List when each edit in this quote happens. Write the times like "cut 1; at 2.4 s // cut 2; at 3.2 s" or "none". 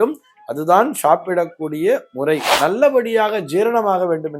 cut 1; at 2.5 s